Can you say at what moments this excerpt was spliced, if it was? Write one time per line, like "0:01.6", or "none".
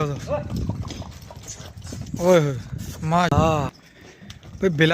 0:03.1